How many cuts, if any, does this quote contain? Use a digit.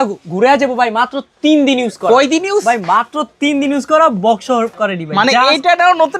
0